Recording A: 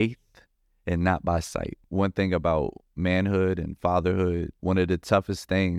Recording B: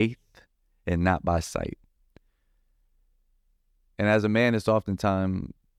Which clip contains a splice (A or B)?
A